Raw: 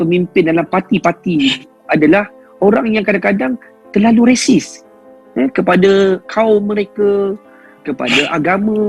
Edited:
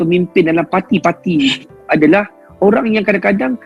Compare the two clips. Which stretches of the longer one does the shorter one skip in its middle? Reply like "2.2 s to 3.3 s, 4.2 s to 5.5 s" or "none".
none